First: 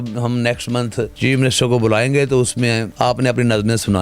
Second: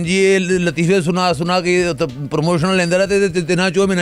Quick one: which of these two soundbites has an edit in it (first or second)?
first